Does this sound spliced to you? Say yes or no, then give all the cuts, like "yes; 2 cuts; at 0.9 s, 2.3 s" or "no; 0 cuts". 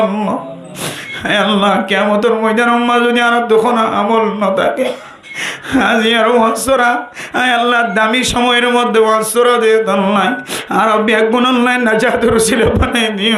no; 0 cuts